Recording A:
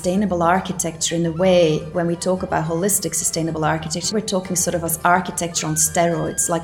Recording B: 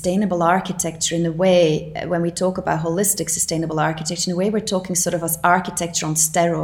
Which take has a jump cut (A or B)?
A